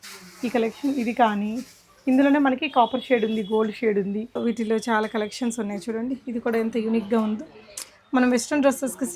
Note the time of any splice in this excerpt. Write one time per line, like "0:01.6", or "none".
0:04.3